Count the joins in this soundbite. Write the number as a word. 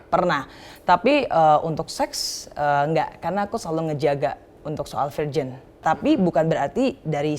one